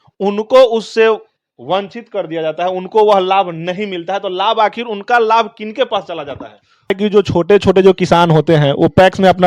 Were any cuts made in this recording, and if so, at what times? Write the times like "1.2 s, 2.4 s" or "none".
7.0 s